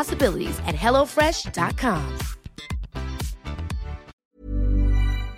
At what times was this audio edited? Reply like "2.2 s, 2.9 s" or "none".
4.1 s